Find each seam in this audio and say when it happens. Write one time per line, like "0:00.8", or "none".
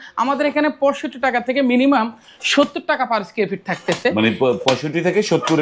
none